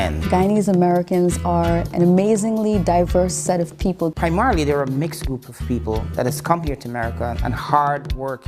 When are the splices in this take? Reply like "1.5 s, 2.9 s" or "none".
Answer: 5.7 s